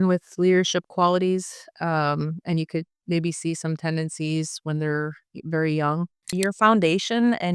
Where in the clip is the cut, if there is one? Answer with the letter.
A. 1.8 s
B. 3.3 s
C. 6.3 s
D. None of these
C